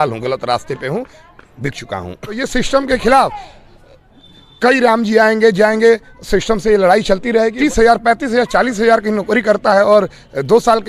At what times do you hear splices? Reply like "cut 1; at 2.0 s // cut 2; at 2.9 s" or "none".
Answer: cut 1; at 2.4 s // cut 2; at 7.5 s

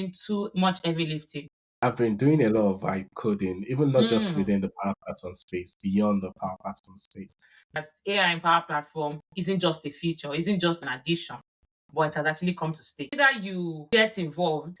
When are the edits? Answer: cut 1; at 1.8 s // cut 2; at 7.7 s // cut 3; at 13.1 s

